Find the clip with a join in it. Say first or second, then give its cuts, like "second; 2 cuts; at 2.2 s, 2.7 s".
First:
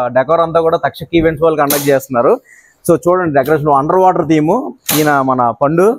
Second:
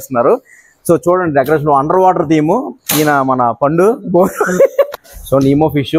second; 1 cut; at 5.0 s